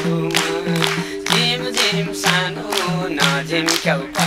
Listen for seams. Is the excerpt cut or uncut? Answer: uncut